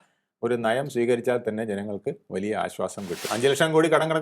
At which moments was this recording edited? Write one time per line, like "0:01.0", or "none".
0:03.2